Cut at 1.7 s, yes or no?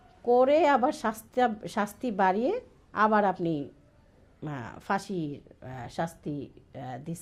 no